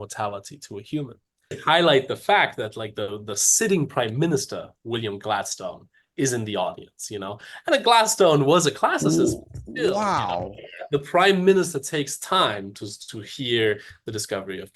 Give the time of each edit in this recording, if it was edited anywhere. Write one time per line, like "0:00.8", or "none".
0:01.6